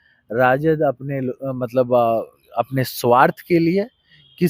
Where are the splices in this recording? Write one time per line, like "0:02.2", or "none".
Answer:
none